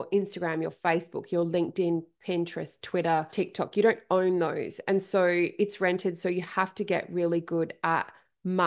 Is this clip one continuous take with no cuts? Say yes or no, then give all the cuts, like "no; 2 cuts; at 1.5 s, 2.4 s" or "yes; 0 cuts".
no; 1 cut; at 3.3 s